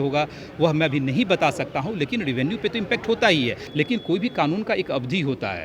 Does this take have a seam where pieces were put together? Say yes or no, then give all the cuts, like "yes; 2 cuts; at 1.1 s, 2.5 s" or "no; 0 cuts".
yes; 1 cut; at 3.6 s